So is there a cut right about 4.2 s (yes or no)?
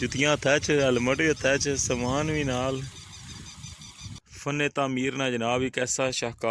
yes